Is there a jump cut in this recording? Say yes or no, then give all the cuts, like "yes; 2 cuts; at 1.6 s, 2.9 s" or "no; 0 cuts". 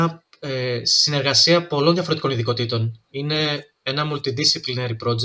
no; 0 cuts